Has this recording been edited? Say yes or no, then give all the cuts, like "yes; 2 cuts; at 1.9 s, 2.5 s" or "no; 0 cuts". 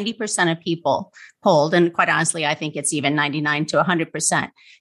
no; 0 cuts